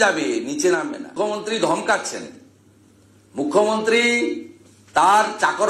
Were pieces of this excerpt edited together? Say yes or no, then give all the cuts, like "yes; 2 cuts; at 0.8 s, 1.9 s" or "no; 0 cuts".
yes; 1 cut; at 1.1 s